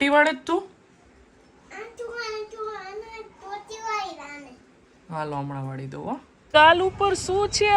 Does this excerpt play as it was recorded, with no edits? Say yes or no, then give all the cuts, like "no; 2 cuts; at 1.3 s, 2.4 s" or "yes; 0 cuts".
no; 1 cut; at 6.3 s